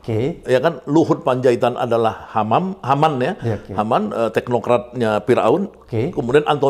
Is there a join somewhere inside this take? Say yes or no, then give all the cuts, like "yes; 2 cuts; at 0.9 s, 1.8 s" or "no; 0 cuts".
no; 0 cuts